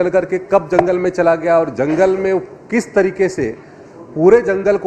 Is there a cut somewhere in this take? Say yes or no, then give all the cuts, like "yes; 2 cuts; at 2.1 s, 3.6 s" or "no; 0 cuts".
no; 0 cuts